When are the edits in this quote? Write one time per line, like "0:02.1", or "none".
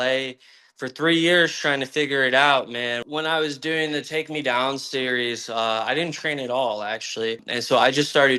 0:03.0
0:07.5